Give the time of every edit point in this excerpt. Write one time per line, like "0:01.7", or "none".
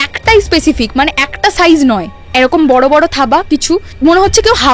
0:02.3
0:03.9